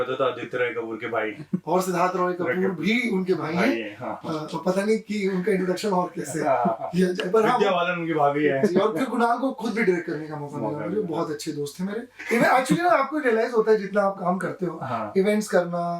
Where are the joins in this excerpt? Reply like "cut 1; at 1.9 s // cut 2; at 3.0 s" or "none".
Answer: cut 1; at 12.1 s